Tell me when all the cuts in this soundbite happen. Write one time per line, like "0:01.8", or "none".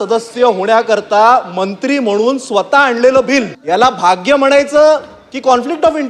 0:03.6